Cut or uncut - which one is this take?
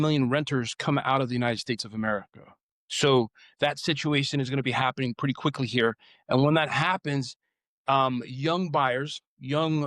cut